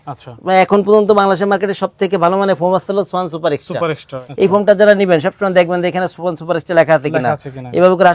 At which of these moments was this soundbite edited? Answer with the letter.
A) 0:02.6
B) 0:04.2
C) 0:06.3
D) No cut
B